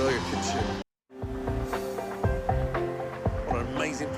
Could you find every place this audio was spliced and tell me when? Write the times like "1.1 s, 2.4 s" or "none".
1.0 s